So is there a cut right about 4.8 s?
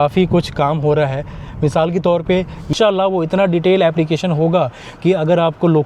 no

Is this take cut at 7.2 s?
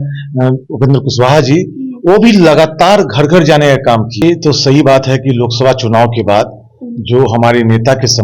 no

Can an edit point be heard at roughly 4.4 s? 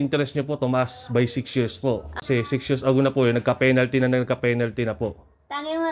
no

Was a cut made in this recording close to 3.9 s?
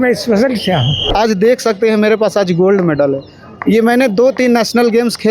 no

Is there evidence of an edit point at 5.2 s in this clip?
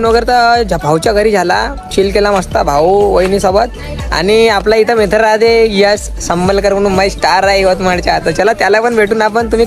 no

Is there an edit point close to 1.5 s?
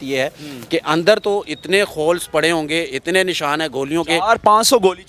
no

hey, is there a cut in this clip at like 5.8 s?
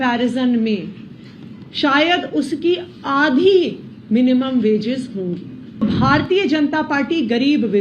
yes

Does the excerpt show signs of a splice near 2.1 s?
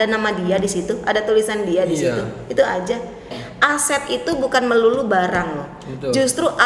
no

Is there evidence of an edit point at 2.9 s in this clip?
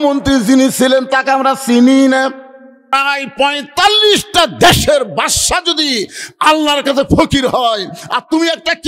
yes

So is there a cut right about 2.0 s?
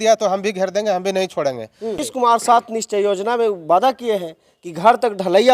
yes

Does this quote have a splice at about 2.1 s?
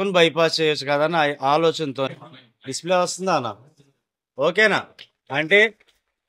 yes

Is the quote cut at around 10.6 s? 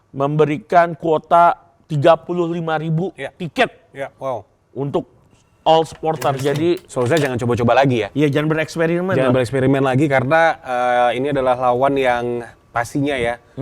no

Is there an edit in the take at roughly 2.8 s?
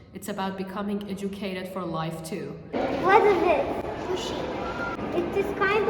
yes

